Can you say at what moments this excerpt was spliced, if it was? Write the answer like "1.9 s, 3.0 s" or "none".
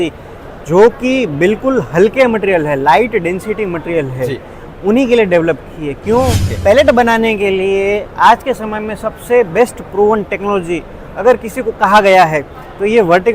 6.5 s